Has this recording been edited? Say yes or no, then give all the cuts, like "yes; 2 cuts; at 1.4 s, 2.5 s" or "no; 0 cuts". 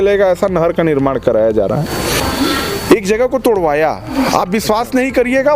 yes; 1 cut; at 2.2 s